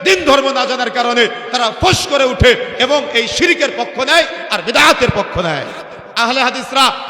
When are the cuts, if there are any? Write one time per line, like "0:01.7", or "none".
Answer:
0:06.1